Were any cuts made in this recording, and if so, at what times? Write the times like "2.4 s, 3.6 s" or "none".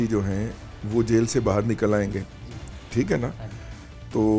none